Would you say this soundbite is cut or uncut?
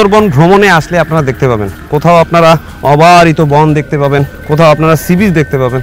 cut